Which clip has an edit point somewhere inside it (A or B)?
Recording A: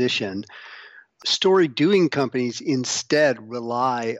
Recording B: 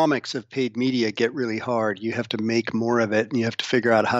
A